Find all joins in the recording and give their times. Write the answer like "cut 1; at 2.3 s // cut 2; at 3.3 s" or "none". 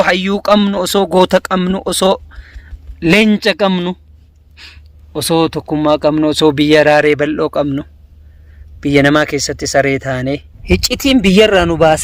cut 1; at 10.5 s